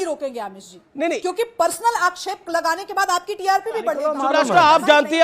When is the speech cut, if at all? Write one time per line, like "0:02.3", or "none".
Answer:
0:04.1